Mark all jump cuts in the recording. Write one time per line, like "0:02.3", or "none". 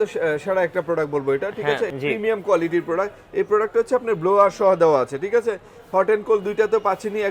0:01.9